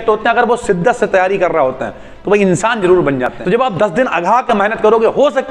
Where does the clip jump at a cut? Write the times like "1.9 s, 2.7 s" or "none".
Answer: 3.3 s